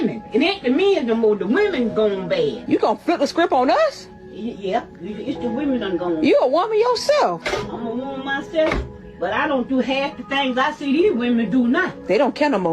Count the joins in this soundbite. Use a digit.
2